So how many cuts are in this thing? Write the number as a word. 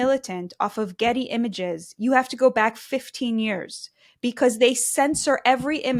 zero